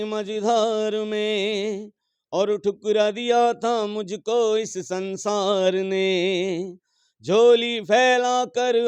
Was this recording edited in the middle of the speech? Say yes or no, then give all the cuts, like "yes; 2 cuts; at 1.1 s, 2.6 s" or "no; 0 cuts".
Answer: no; 0 cuts